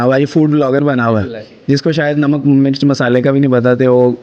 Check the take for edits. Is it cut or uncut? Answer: uncut